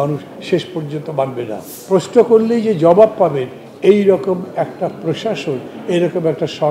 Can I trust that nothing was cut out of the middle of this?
no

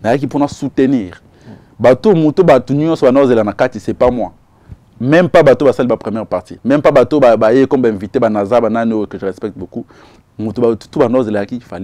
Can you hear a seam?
no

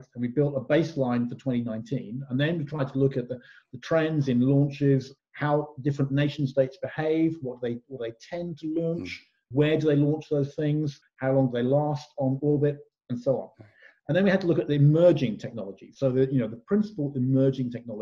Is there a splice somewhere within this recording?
yes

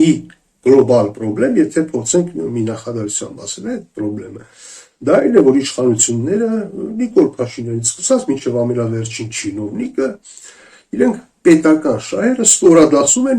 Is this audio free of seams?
yes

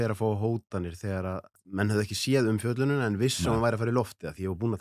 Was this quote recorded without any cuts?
no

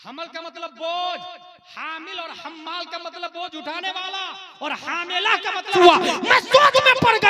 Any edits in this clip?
yes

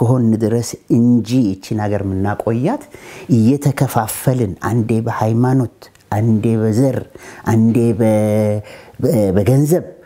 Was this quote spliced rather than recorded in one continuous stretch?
no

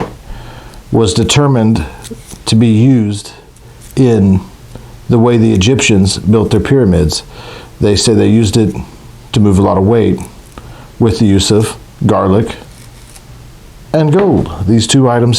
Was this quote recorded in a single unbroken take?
yes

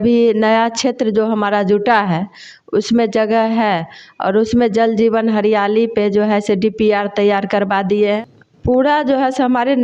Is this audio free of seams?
no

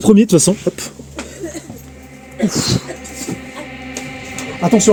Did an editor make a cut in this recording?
no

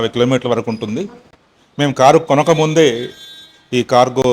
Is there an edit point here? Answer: no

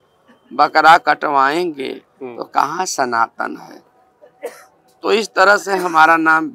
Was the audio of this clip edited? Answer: no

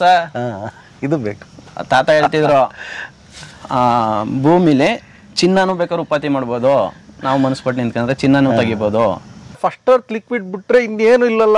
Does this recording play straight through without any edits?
no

